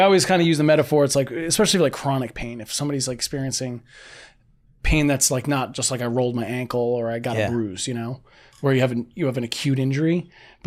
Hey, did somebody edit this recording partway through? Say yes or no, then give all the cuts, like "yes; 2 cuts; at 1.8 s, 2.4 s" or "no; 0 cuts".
no; 0 cuts